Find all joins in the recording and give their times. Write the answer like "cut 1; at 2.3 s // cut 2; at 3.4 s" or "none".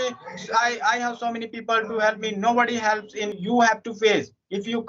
cut 1; at 3.4 s